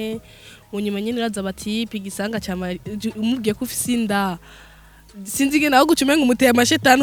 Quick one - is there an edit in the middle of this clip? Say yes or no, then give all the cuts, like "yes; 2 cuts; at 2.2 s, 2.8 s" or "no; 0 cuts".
no; 0 cuts